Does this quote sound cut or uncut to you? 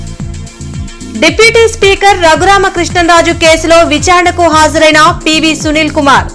uncut